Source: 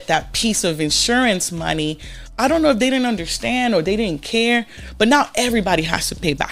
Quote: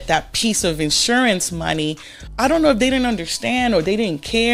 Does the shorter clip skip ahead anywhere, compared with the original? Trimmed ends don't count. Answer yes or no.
no